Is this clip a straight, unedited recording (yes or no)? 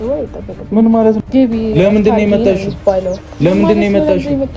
no